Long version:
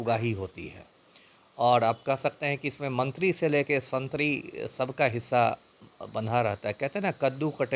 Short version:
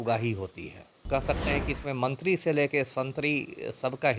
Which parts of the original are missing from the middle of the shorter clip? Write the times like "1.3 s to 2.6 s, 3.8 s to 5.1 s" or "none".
1.0 s to 2.0 s